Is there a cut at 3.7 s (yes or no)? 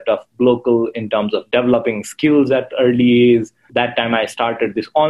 yes